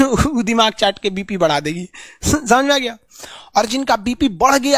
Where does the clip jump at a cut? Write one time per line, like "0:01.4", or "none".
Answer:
none